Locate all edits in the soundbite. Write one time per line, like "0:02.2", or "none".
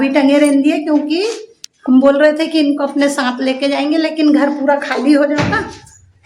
none